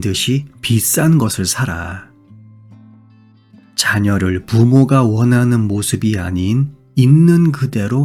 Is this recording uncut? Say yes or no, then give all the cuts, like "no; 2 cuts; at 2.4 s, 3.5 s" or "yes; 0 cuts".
yes; 0 cuts